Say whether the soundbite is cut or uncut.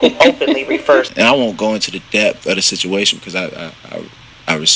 cut